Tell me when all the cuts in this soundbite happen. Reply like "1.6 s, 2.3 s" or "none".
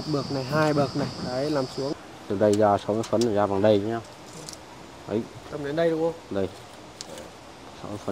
1.9 s